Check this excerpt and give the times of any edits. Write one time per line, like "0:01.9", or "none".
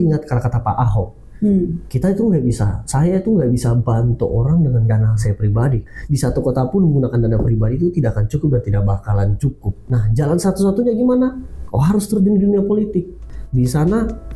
0:05.9
0:09.9
0:13.2